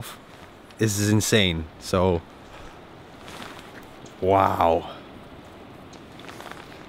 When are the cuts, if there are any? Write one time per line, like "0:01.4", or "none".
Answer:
none